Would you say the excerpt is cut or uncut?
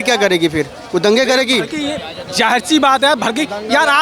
uncut